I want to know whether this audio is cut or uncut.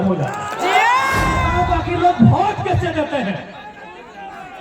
cut